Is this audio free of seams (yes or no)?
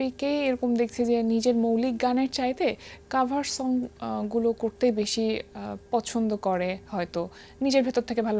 yes